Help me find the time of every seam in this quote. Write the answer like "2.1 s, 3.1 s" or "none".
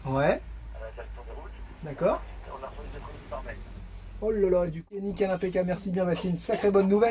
5.0 s